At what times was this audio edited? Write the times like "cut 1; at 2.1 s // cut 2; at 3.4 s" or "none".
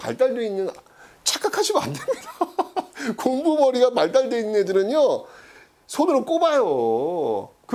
none